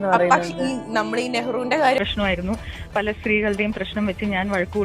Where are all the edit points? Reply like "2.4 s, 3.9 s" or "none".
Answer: 2.0 s